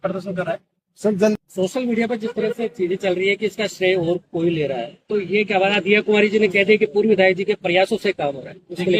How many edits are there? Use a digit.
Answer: 1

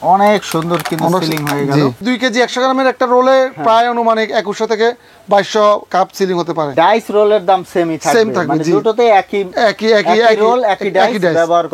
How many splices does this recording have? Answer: 2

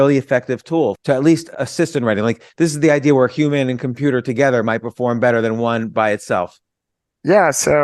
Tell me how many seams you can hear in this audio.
2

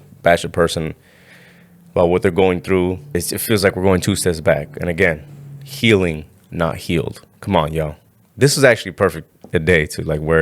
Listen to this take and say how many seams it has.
1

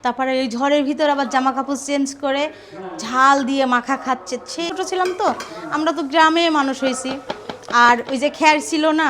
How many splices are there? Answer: 1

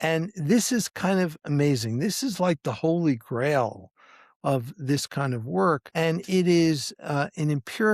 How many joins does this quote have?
1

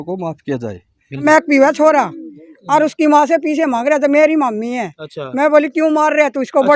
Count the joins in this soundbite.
1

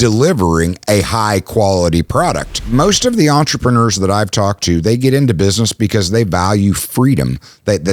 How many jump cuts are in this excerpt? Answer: 1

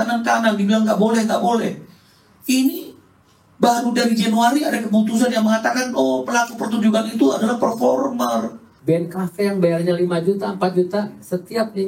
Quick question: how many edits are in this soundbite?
1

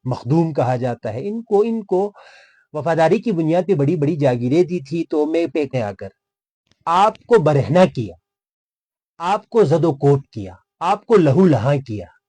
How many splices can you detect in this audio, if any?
1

